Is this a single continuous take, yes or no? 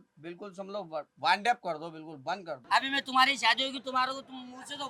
no